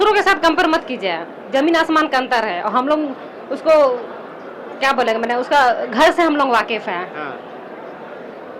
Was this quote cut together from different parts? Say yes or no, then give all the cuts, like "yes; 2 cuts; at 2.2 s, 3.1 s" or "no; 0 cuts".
no; 0 cuts